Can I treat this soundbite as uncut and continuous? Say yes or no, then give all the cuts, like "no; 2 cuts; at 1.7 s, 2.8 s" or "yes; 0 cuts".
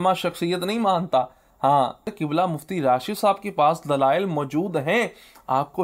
no; 1 cut; at 2.1 s